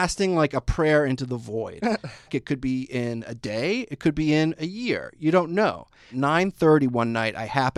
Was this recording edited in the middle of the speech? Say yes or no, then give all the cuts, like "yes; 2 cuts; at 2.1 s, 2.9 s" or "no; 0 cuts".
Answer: yes; 2 cuts; at 2.3 s, 6.1 s